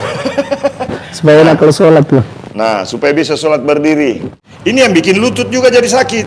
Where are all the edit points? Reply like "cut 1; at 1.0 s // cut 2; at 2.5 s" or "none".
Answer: cut 1; at 4.3 s